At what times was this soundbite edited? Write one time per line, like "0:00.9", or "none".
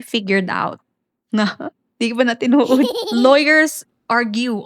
0:03.0

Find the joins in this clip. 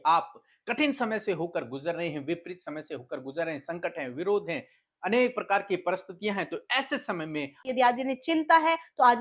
0:07.7

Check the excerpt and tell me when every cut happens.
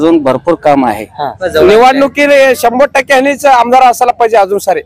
0:01.4

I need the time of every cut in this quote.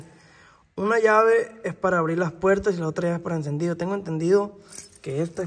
none

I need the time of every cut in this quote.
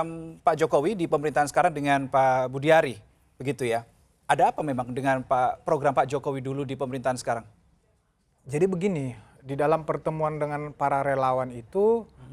none

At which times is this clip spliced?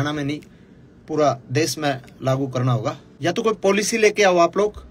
0:03.1

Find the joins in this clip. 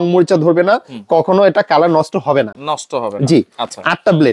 none

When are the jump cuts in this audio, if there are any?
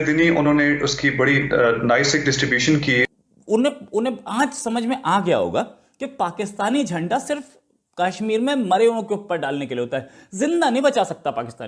0:03.1

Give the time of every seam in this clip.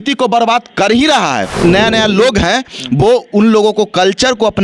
0:01.5

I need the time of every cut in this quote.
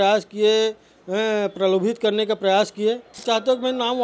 0:03.1

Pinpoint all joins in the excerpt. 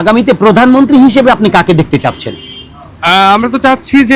none

